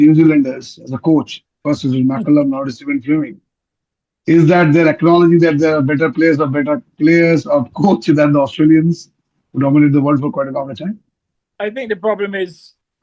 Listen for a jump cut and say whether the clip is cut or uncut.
cut